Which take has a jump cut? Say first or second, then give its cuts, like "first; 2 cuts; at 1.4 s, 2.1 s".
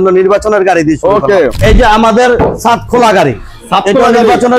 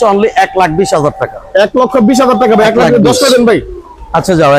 first; 1 cut; at 1.6 s